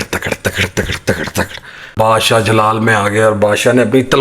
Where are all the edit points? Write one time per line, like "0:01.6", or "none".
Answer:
0:01.9

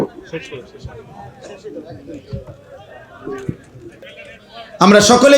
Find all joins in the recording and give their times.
0:04.0

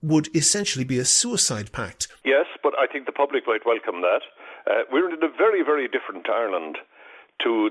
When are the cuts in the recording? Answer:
0:02.0

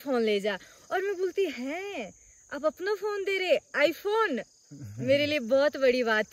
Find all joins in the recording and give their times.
none

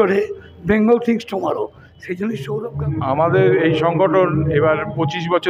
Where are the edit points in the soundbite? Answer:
0:02.6

